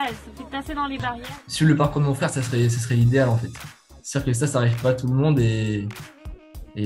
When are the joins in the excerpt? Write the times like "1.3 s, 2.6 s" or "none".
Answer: 1.2 s